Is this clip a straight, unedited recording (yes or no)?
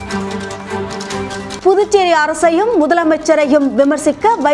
no